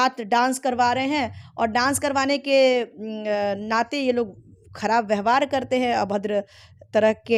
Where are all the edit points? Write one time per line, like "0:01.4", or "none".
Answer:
none